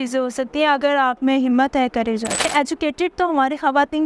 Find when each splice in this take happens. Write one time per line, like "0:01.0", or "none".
0:02.4

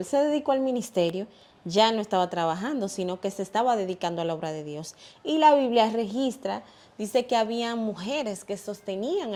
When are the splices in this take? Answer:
none

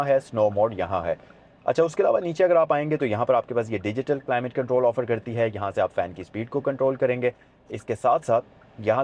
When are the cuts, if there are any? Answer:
none

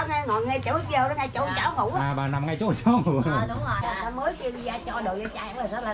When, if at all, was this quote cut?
0:03.9

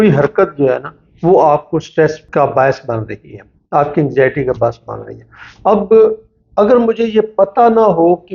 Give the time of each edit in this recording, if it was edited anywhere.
0:02.2

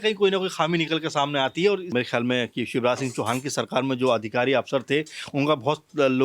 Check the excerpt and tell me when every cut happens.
0:01.9

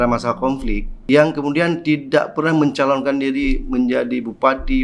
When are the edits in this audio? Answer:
0:00.9

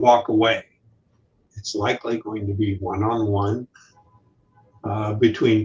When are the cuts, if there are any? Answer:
0:01.5

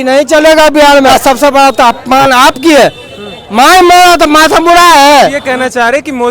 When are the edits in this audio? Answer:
0:01.1
0:05.4

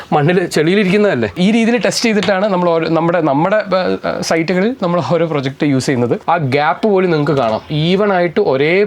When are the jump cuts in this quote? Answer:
0:01.4
0:06.2

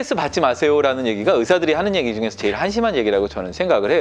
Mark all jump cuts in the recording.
none

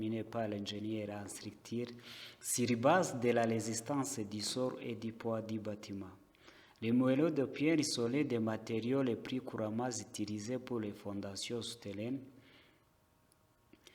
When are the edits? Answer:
none

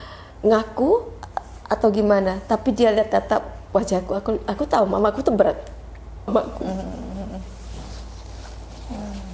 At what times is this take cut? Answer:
0:06.3

